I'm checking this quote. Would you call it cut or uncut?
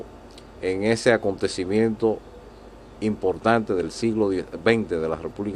cut